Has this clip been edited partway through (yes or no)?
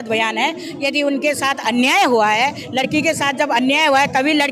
no